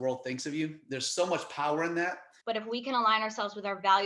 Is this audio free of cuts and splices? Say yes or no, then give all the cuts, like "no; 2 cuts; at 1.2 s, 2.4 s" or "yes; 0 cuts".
no; 1 cut; at 2.3 s